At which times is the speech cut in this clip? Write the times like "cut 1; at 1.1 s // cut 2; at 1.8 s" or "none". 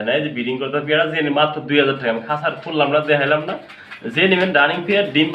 none